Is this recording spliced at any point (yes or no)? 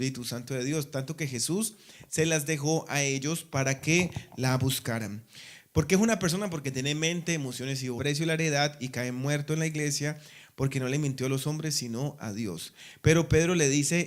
no